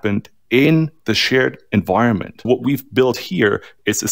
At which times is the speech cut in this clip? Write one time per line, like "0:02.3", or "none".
0:02.5